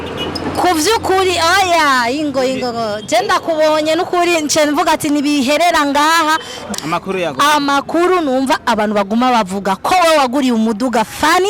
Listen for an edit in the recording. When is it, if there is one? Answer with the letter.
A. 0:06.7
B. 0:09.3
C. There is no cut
A